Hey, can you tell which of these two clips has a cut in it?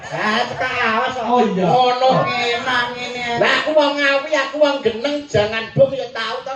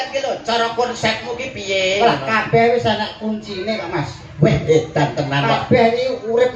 first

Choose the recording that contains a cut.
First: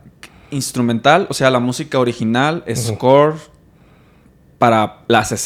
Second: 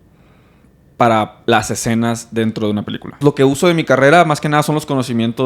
second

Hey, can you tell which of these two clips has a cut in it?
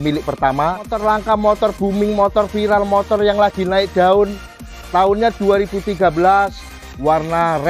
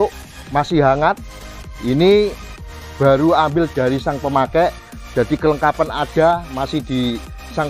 first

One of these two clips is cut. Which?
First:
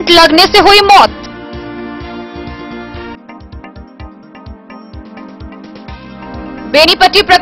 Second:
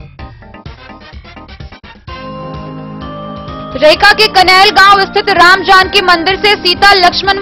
second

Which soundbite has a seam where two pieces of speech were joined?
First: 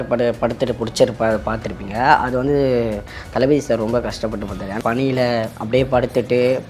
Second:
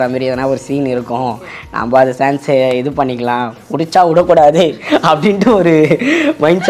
first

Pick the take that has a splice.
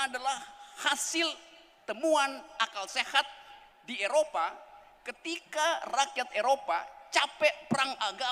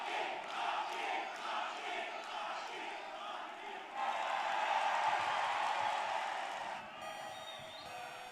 second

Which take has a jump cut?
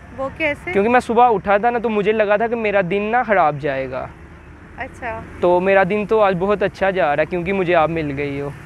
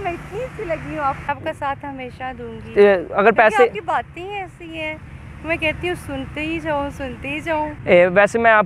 second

